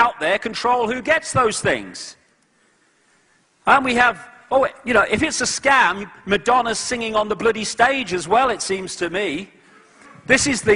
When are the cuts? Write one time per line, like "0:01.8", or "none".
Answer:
none